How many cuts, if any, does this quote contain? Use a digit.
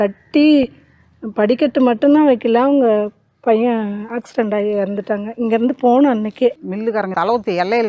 1